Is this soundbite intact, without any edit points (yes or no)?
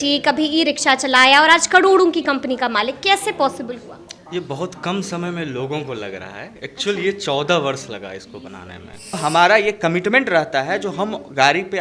no